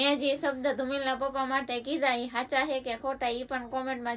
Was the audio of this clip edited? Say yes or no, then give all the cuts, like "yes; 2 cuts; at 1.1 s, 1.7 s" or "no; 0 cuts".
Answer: no; 0 cuts